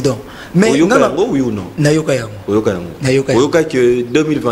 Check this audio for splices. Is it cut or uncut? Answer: uncut